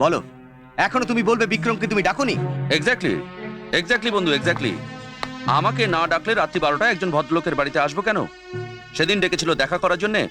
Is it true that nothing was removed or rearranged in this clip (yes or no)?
yes